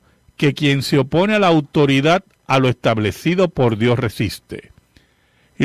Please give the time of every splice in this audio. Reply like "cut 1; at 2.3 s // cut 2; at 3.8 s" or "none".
cut 1; at 1.1 s